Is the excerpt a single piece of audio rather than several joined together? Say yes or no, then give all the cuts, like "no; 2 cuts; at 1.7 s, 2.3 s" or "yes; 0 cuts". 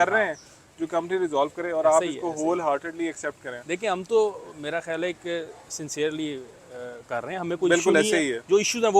yes; 0 cuts